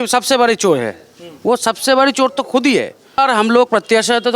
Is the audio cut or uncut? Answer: cut